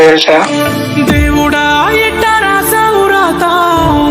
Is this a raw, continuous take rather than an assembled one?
yes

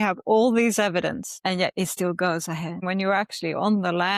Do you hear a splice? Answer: yes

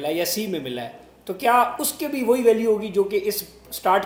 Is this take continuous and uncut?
yes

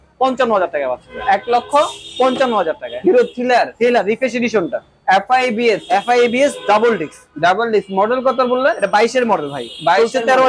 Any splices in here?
no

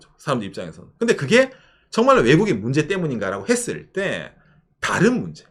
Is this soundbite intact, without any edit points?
yes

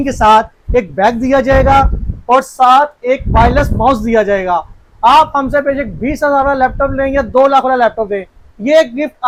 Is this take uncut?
yes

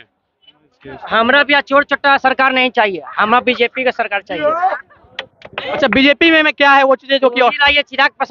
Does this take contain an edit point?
yes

